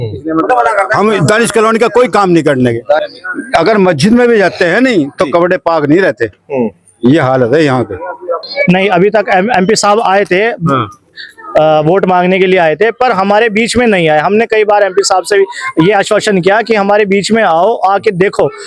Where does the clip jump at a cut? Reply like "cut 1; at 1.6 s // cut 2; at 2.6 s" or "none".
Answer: cut 1; at 3.0 s // cut 2; at 8.4 s